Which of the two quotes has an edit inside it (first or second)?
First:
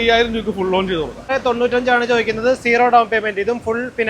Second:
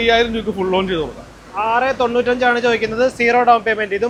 first